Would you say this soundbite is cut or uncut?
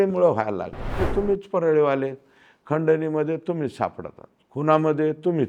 cut